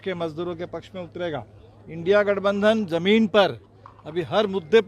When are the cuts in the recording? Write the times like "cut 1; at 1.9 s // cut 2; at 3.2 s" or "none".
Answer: none